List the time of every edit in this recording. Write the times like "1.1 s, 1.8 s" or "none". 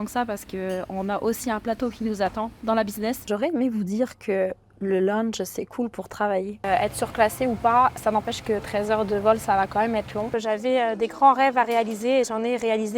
3.3 s, 6.6 s, 10.3 s